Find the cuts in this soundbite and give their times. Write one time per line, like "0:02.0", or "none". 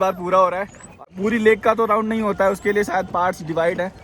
0:01.0